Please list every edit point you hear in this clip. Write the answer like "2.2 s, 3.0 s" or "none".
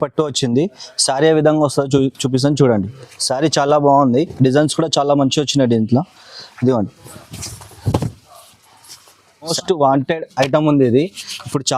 9.5 s